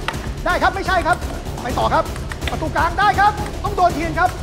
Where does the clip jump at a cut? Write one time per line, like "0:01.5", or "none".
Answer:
0:03.5